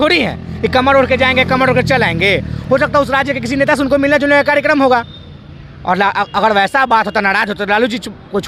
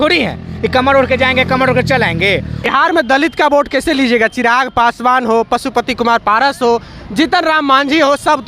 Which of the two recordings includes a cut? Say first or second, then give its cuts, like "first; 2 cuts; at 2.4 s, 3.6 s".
second; 1 cut; at 2.5 s